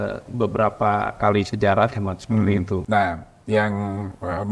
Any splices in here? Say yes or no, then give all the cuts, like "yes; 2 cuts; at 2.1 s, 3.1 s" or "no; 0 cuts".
yes; 1 cut; at 2.8 s